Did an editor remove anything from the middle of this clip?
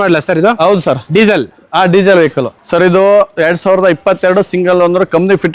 yes; 1 cut; at 2.5 s

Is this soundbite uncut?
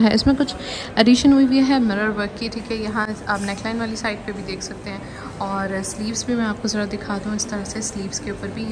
yes; 0 cuts

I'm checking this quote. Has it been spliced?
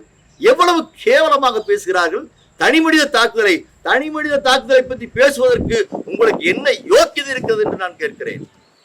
no; 0 cuts

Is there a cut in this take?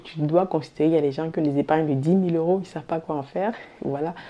no; 0 cuts

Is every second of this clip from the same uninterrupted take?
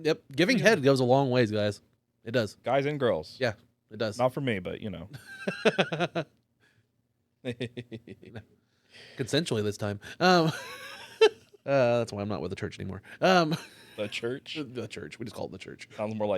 no; 1 cut; at 11.5 s

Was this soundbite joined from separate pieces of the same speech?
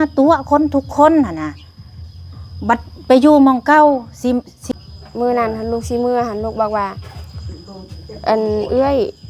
yes; 1 cut; at 4.5 s

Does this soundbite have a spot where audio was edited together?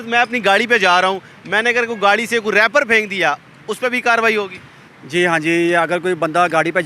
no; 0 cuts

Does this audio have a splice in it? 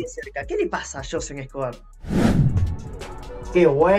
no; 0 cuts

